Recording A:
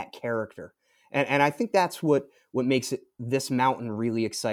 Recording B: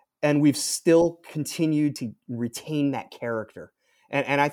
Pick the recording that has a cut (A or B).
B